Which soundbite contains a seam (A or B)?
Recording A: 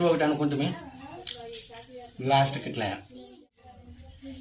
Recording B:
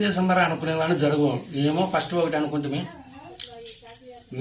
A